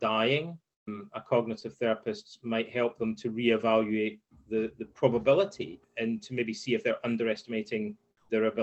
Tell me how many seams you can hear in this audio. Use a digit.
2